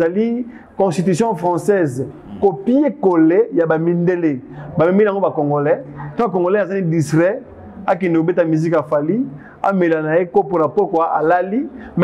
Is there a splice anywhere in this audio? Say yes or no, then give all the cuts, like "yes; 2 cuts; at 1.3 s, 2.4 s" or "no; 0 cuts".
no; 0 cuts